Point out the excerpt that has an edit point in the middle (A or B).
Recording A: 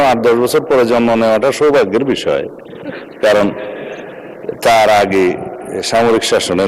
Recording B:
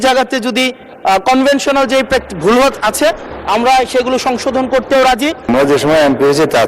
B